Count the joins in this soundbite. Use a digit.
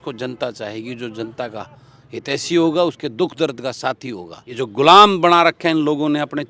1